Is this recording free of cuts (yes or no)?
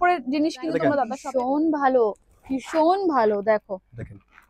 no